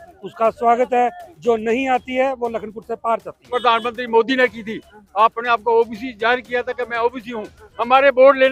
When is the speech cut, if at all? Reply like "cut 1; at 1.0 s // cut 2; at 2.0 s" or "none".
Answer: cut 1; at 3.4 s